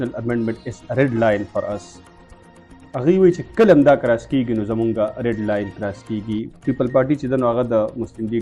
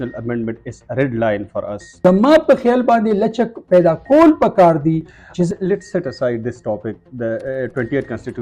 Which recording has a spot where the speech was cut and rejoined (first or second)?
second